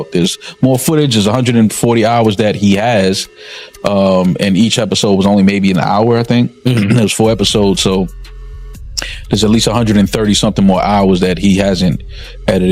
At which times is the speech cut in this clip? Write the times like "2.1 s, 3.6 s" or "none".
none